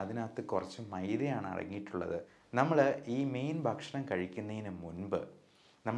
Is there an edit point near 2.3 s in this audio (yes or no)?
yes